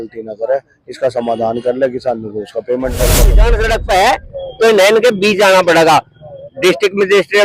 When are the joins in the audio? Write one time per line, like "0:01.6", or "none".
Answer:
0:03.3